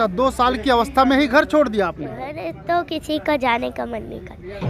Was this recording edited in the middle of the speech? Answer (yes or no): yes